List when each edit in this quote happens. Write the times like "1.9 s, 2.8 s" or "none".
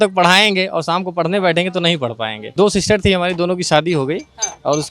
2.4 s